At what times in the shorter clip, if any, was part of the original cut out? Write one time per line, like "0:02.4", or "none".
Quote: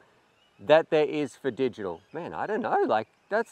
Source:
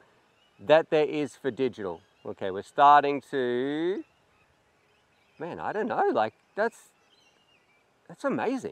0:02.1